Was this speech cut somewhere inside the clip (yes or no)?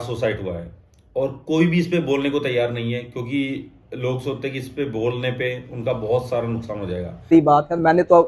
yes